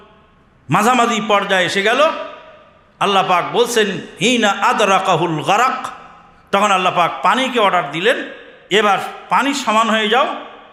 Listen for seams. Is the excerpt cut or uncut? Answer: uncut